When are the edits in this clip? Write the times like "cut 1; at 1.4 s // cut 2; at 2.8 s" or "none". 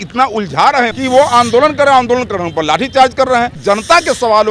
cut 1; at 1.0 s // cut 2; at 3.6 s